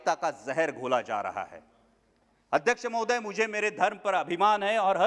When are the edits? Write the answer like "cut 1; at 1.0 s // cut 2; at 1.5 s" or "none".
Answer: none